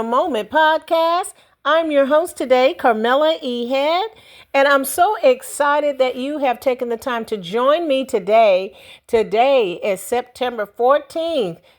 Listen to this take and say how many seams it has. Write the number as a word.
one